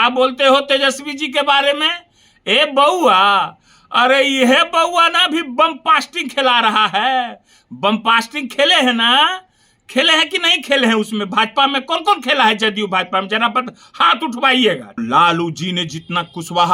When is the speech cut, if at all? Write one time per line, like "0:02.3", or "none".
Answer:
0:14.9

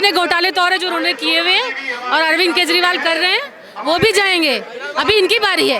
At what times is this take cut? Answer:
none

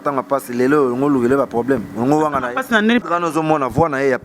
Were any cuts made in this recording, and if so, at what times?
0:03.0

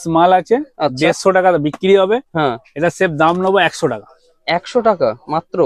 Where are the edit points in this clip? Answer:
none

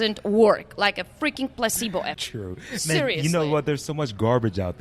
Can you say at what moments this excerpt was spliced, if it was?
0:02.3

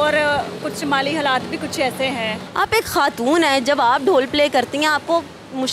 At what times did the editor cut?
0:02.4

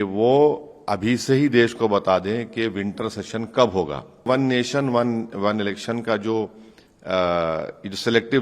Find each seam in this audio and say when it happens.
0:04.3

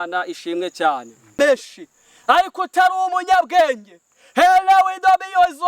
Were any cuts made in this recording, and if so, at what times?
0:01.2

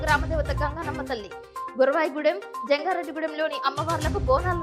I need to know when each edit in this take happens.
none

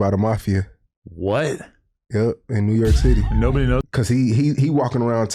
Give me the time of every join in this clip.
0:03.8

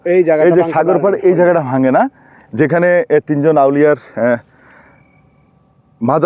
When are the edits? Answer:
none

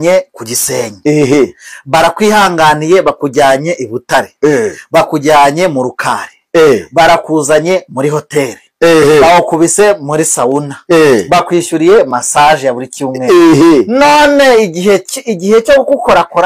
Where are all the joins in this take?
none

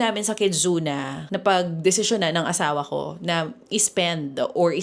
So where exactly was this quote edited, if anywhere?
none

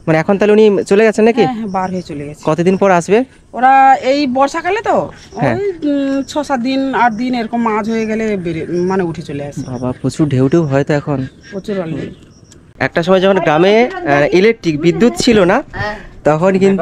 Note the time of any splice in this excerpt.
0:12.6

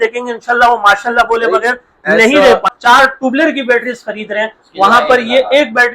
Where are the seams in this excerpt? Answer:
0:02.7

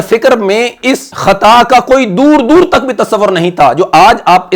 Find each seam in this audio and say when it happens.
0:01.1

